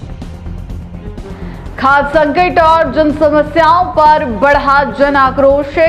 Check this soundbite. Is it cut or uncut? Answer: cut